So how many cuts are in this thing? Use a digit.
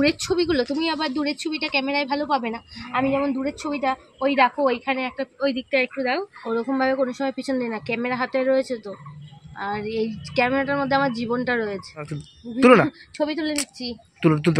2